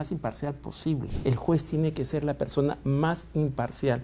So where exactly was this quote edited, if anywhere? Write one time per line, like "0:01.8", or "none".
0:01.1

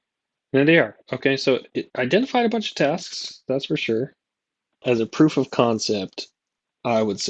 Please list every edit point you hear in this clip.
0:01.8
0:04.8

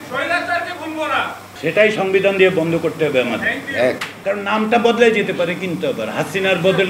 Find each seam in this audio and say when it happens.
0:01.4
0:04.1

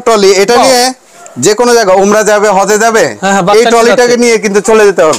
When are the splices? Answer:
none

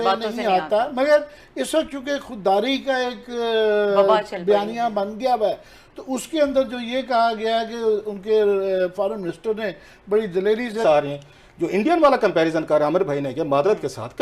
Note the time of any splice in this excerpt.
0:10.8

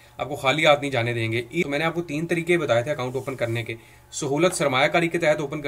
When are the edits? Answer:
0:01.6

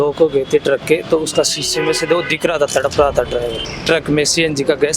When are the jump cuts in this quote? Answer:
0:03.7

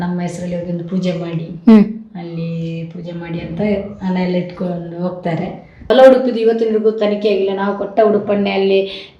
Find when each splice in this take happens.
0:05.9

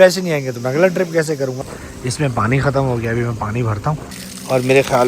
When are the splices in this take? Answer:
0:01.6
0:03.9

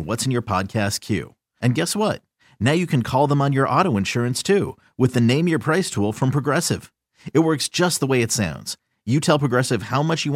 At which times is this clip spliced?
none

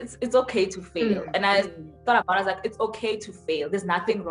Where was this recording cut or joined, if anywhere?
none

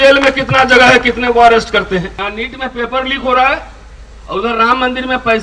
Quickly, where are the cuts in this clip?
0:02.2

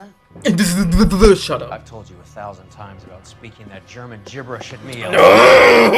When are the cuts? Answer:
none

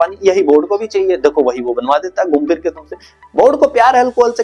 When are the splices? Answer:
none

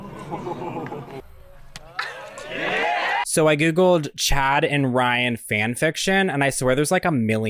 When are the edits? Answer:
none

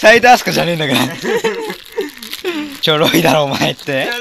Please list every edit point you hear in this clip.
0:02.7

